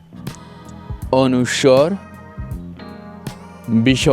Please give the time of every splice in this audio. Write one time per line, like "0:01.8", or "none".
0:01.0